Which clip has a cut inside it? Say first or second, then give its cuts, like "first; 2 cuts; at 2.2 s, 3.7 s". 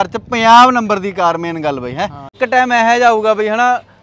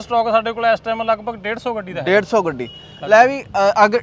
first; 1 cut; at 2.3 s